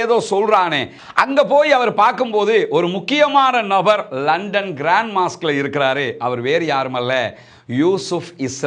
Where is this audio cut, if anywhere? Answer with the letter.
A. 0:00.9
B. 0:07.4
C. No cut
A